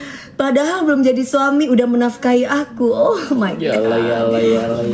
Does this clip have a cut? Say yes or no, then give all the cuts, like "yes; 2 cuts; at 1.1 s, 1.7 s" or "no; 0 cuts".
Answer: no; 0 cuts